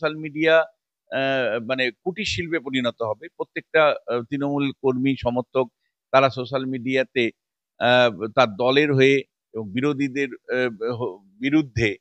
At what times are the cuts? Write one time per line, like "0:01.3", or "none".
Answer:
none